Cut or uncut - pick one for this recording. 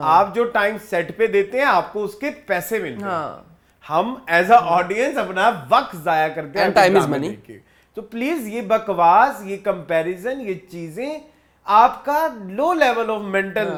uncut